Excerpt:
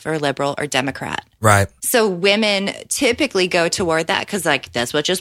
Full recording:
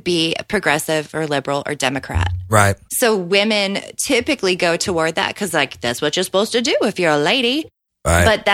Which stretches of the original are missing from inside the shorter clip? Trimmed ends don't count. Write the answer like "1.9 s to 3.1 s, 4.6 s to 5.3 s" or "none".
none